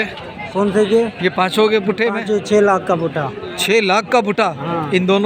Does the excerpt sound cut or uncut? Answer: uncut